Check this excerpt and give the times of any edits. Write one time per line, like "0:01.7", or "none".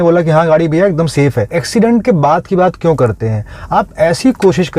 0:01.6